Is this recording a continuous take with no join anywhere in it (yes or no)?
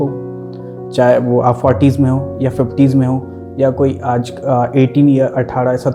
yes